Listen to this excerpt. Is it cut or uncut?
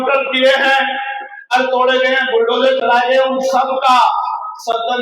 cut